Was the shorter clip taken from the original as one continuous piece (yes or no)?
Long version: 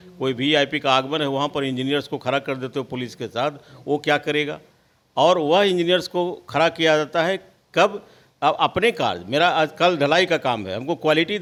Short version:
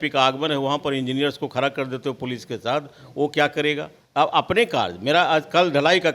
no